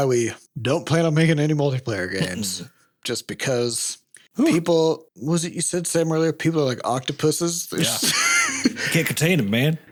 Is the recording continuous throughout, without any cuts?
yes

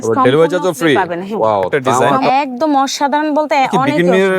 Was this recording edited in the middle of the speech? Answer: yes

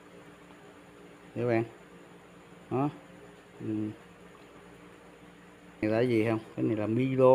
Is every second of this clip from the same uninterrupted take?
no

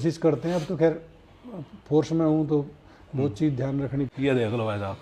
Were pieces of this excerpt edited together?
yes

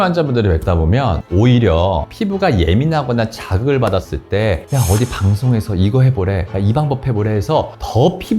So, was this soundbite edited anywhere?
yes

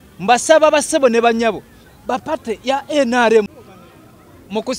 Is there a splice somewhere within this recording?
yes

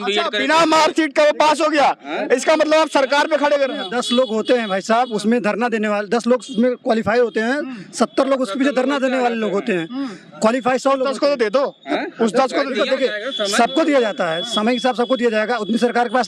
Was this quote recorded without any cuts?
yes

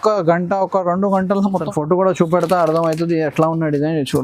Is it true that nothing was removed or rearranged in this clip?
no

